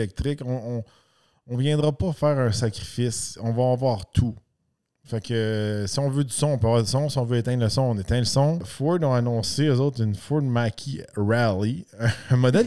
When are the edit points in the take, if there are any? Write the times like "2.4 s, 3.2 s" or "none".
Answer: 8.7 s